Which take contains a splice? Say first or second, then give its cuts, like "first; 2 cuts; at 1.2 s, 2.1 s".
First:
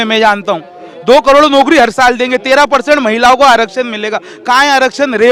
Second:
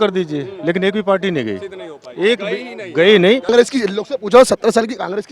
second; 1 cut; at 3.5 s